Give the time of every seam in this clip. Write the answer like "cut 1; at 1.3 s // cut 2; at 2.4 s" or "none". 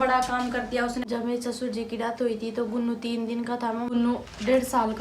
cut 1; at 1.0 s // cut 2; at 3.9 s